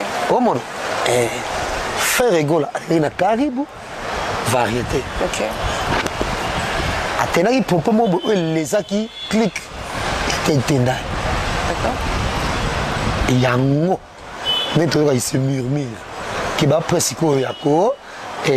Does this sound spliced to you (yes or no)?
no